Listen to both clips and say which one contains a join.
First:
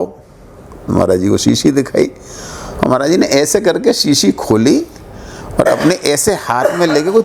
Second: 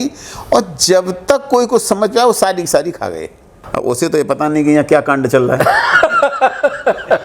second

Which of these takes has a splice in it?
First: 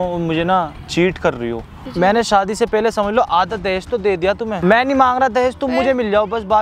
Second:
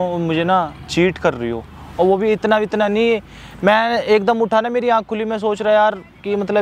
first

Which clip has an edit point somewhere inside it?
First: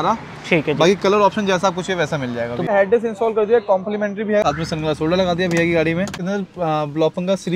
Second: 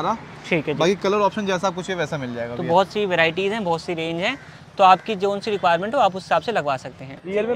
first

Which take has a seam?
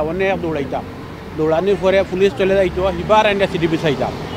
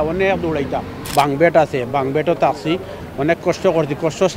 second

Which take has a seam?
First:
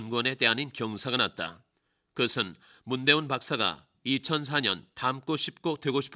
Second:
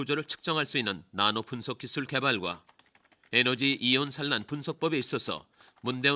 second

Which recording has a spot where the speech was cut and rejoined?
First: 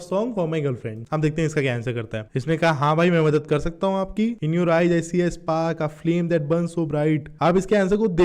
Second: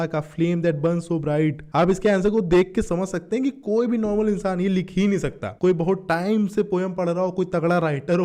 first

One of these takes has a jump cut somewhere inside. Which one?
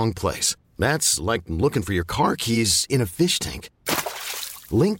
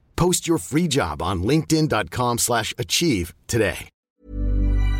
second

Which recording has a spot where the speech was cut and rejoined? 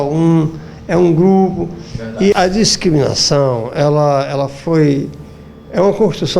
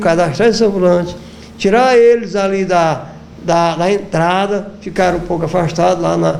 first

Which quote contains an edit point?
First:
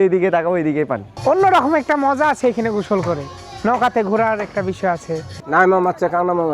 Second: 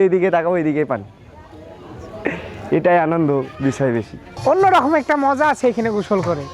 first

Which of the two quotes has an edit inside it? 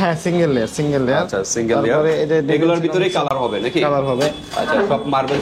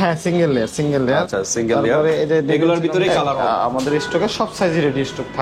second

